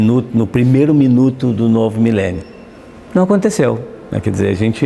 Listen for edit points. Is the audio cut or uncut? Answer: uncut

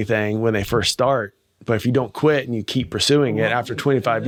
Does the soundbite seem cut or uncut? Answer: uncut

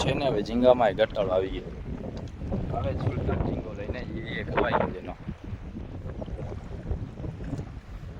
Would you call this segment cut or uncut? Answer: uncut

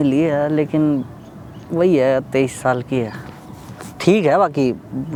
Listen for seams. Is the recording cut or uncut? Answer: uncut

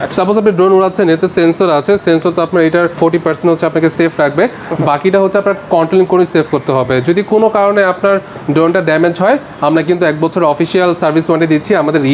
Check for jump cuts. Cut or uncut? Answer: uncut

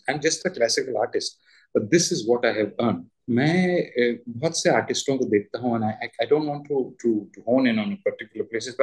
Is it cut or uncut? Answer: cut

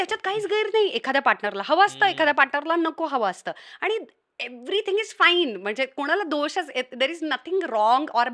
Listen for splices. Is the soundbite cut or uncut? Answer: uncut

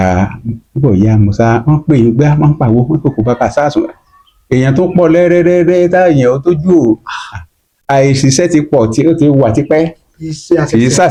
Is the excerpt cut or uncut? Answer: uncut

